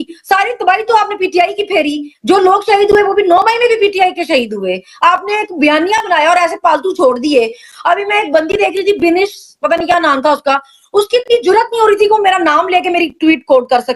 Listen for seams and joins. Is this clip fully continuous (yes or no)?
yes